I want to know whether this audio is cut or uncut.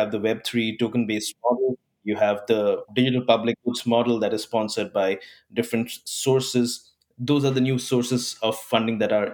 uncut